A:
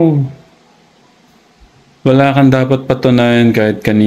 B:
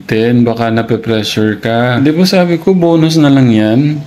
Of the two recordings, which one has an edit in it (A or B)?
B